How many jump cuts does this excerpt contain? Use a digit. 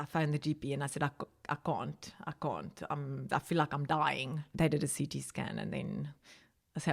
2